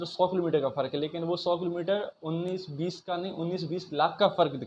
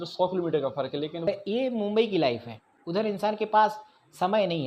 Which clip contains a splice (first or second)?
second